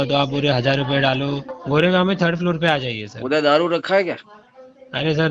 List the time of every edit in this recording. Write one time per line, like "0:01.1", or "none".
0:01.5